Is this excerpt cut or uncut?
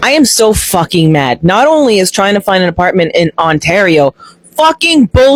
uncut